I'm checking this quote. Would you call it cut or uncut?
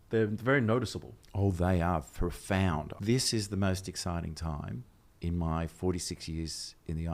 uncut